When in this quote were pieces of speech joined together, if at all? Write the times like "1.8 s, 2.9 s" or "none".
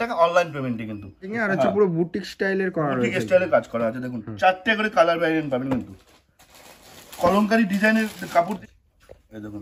1.3 s, 8.6 s